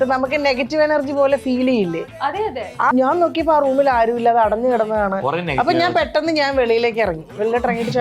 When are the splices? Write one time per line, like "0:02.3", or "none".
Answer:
0:02.9